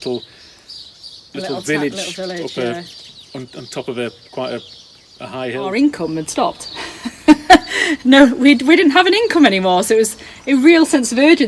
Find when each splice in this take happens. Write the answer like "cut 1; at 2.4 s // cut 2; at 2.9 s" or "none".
cut 1; at 5.7 s